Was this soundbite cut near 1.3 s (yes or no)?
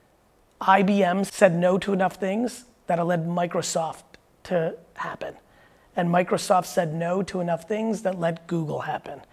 yes